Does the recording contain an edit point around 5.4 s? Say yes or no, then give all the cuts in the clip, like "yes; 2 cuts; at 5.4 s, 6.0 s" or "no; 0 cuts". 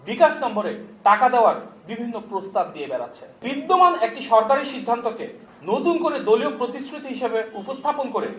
no; 1 cut; at 3.4 s